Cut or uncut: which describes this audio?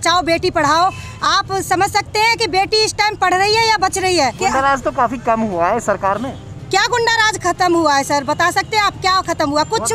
cut